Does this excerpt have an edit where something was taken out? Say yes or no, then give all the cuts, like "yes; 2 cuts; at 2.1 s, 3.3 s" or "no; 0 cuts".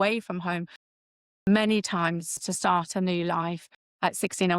yes; 1 cut; at 1.0 s